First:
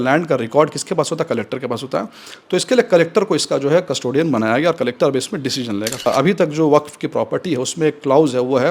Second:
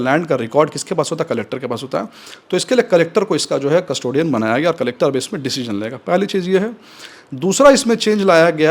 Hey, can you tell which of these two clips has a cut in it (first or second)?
first